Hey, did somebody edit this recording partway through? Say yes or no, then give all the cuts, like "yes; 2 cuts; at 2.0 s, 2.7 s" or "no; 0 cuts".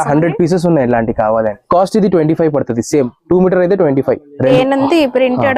yes; 2 cuts; at 1.6 s, 4.5 s